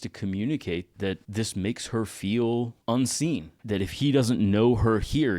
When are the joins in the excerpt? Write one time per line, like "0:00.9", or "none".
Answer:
0:01.2
0:02.8